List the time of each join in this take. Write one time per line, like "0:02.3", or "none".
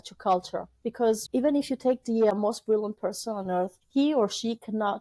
0:01.2
0:02.3
0:03.8